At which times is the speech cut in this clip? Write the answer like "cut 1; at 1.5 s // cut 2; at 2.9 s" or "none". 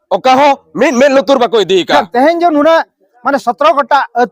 cut 1; at 2.0 s